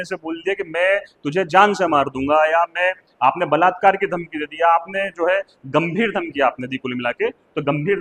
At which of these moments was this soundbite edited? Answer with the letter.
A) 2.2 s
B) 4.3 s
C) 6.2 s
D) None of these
D